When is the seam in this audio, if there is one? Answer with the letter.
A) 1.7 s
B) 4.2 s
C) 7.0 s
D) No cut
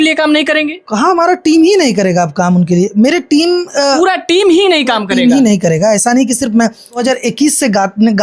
C